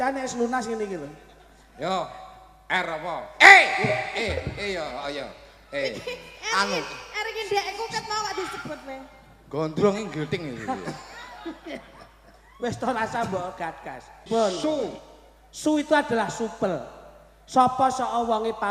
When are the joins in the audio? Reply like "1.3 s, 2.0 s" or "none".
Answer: 14.3 s